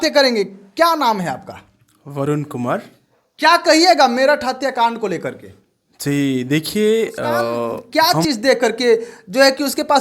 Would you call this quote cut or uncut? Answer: cut